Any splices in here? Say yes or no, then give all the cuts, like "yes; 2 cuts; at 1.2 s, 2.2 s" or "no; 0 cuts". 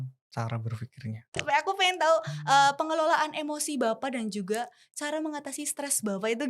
yes; 1 cut; at 1.4 s